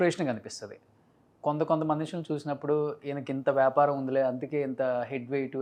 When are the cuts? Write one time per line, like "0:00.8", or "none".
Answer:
none